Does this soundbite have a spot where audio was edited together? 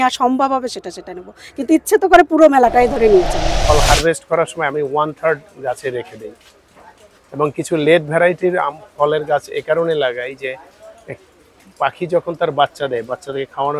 yes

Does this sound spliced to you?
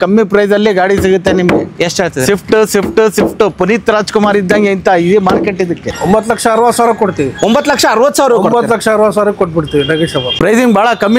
yes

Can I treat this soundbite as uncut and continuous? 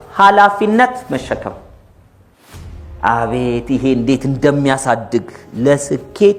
yes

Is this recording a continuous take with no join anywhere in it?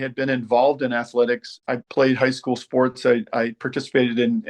no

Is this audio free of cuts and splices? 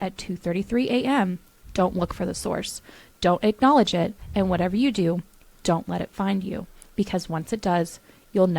yes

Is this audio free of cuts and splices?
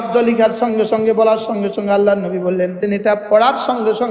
no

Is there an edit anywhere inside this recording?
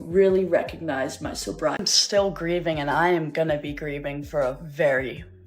yes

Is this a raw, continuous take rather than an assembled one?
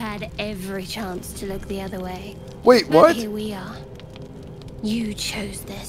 yes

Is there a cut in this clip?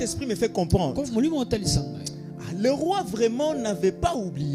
no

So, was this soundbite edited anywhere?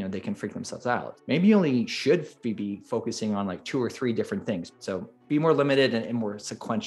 yes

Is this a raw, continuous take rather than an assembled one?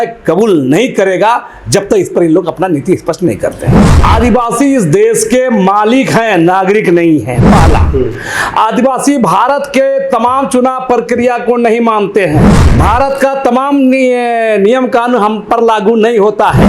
no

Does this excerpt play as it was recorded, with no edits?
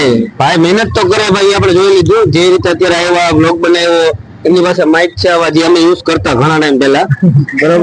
yes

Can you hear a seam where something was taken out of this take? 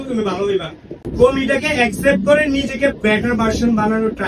yes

